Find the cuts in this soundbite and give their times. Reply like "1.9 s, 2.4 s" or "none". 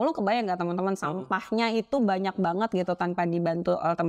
none